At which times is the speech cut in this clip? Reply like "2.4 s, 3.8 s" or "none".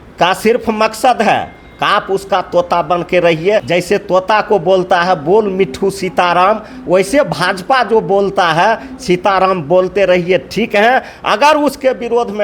3.7 s